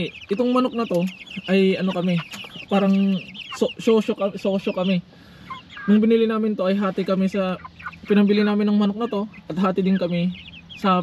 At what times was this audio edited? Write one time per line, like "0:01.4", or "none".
none